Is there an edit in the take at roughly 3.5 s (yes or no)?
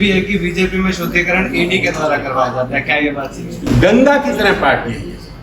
yes